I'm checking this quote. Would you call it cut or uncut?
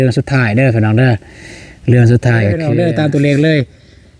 cut